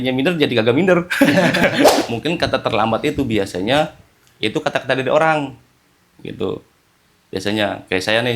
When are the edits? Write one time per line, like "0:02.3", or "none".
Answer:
0:01.9